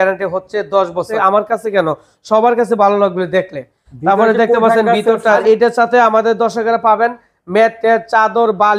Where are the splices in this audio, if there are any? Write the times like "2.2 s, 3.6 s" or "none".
1.1 s, 5.4 s